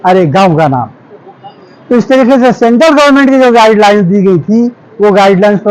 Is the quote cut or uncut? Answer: uncut